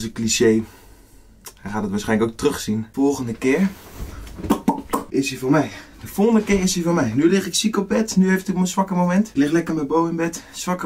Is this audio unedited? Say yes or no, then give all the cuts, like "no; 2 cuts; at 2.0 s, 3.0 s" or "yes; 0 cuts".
yes; 0 cuts